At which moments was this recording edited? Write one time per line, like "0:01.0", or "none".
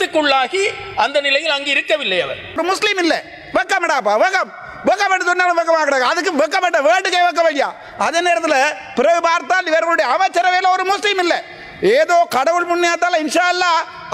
0:02.6